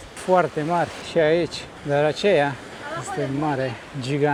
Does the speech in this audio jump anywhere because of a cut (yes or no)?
no